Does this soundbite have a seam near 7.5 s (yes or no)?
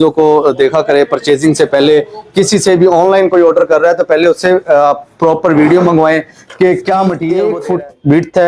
yes